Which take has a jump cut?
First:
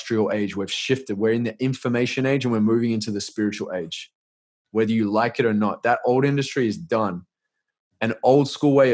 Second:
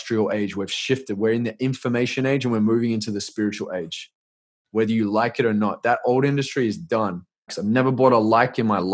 second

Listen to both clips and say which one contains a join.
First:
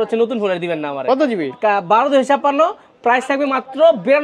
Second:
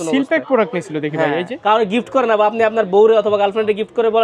second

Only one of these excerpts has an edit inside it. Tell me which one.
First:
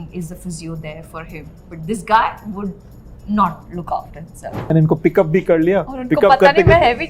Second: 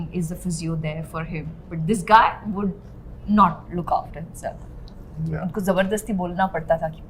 first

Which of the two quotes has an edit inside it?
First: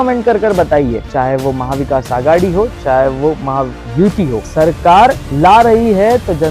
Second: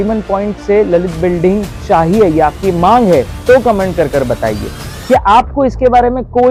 first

